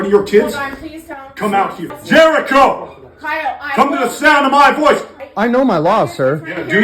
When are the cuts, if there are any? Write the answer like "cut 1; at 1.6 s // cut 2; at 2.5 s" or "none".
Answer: cut 1; at 2.0 s // cut 2; at 5.2 s